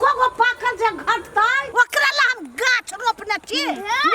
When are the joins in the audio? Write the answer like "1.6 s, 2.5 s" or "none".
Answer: 1.6 s